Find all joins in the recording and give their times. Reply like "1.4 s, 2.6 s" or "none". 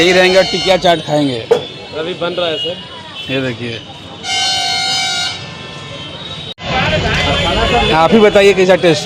none